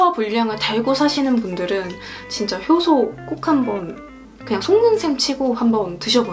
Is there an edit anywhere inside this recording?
no; 0 cuts

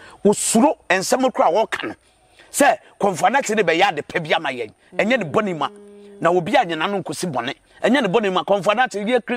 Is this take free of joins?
yes; 0 cuts

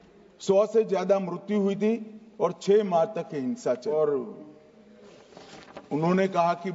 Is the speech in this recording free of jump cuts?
no; 1 cut; at 3.8 s

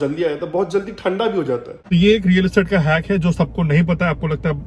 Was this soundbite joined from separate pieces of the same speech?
yes; 1 cut; at 1.8 s

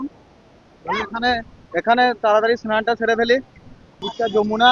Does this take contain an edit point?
yes; 1 cut; at 3.5 s

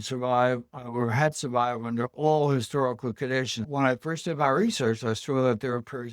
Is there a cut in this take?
yes; 1 cut; at 3.6 s

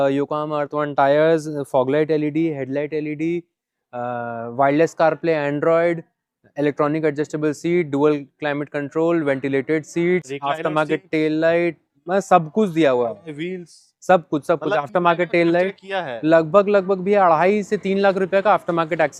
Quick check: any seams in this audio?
no; 0 cuts

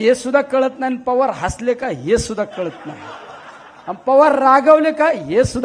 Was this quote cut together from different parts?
no; 0 cuts

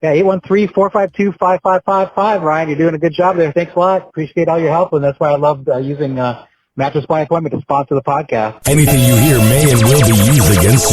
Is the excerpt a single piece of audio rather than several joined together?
no; 1 cut; at 8.6 s

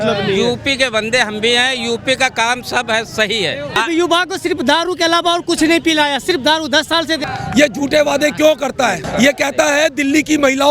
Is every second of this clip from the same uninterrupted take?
no; 3 cuts; at 3.8 s, 7.2 s, 9.0 s

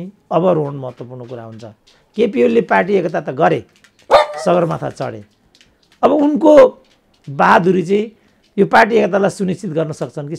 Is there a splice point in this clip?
no; 0 cuts

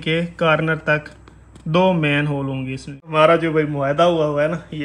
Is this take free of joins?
no; 1 cut; at 3.1 s

